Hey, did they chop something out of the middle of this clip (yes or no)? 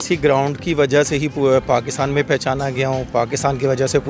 no